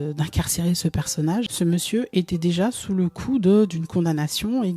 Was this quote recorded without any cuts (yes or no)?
no